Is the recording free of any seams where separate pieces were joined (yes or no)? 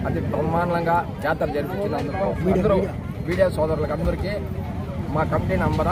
yes